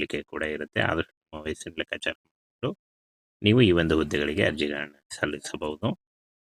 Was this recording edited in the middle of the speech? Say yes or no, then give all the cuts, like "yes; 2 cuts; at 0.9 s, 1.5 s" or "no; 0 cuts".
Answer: no; 0 cuts